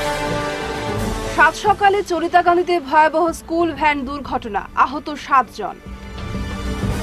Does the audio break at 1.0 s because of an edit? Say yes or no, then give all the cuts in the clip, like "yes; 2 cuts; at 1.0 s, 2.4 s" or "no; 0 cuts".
yes; 1 cut; at 1.0 s